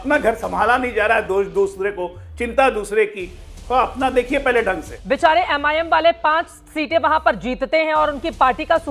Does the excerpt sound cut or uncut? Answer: cut